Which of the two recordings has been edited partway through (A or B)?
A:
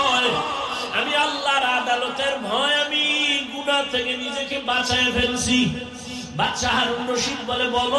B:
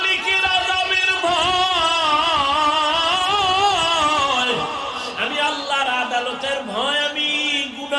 A